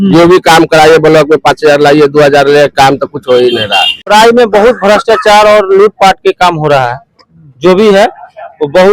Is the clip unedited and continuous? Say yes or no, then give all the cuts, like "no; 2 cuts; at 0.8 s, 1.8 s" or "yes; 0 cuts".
no; 1 cut; at 4.1 s